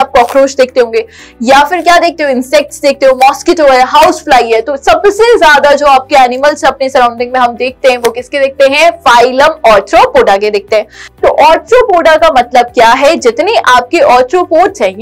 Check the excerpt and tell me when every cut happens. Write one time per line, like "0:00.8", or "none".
0:11.0